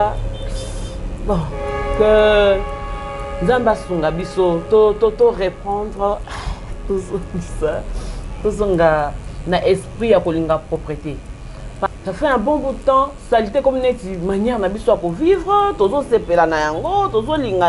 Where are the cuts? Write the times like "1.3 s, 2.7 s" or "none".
11.9 s